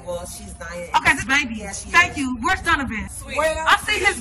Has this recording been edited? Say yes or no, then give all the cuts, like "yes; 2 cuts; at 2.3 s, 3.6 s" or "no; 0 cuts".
yes; 2 cuts; at 1.8 s, 3.0 s